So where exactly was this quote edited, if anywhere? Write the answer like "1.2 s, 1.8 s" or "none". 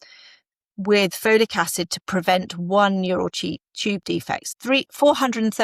4.4 s

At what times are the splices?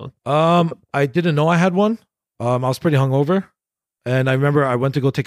none

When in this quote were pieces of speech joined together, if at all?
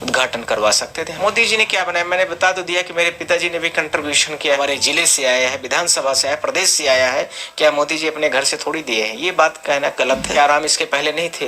1.1 s, 4.6 s, 10.3 s

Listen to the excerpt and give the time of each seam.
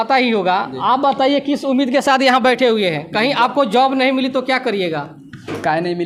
none

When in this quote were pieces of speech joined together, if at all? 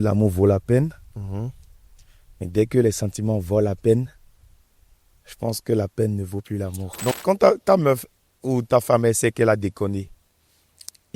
7.1 s

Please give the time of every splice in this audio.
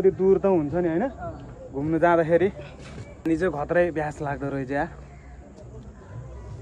none

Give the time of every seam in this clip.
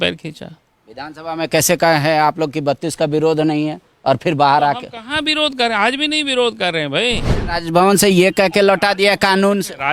7.3 s

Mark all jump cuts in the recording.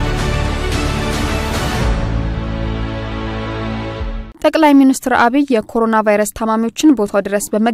none

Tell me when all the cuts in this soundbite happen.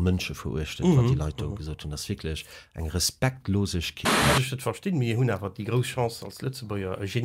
3.9 s

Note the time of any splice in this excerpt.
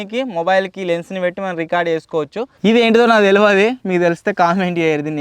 2.4 s

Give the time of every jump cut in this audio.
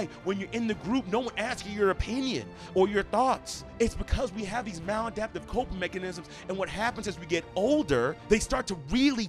none

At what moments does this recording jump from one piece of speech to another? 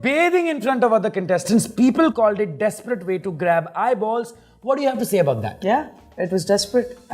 none

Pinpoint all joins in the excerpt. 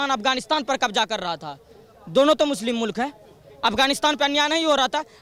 none

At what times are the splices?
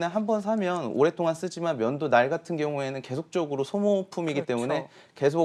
none

